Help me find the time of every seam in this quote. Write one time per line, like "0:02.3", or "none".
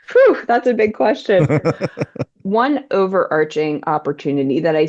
0:02.4